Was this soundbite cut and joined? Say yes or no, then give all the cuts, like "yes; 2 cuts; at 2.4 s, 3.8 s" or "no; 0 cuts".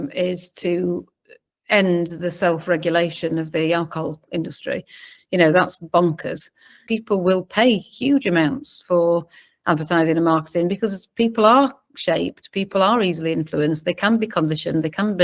yes; 1 cut; at 6.8 s